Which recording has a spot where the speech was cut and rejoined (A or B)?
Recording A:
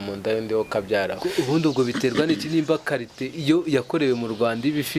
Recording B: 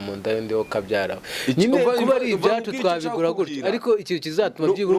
A